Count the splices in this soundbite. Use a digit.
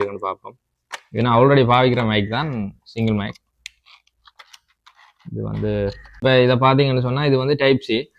1